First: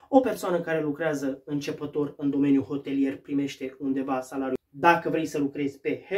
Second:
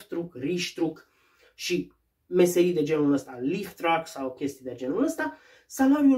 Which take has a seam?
first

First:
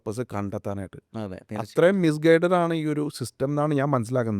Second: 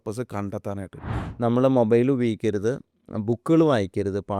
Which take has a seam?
second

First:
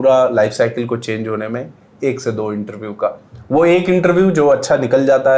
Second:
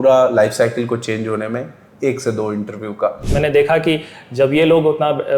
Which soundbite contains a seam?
second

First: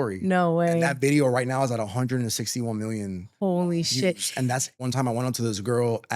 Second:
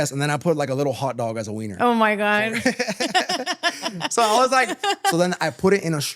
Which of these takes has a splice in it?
first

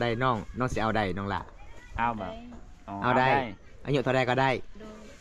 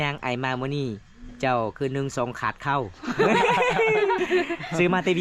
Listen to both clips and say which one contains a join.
second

